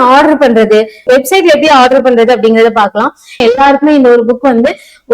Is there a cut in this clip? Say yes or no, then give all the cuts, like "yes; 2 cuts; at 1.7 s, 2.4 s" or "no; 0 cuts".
yes; 1 cut; at 3.4 s